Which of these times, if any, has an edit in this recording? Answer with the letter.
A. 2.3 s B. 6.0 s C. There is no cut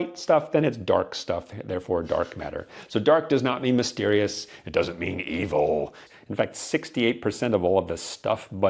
B